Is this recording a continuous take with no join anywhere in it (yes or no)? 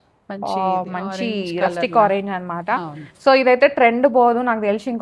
yes